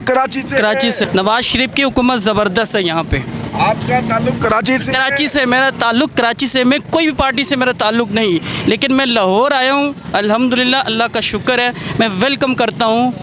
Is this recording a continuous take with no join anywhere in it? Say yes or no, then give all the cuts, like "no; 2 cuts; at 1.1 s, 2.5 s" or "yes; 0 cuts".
no; 1 cut; at 1.0 s